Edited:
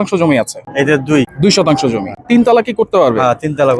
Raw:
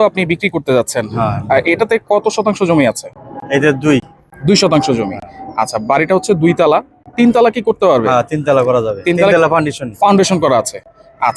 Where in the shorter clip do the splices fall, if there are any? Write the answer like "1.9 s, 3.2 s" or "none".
1.0 s, 2.1 s